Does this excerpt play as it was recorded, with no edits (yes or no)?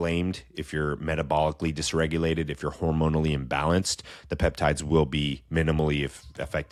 yes